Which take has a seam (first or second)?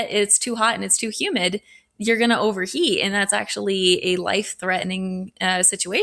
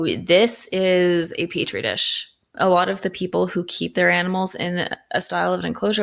second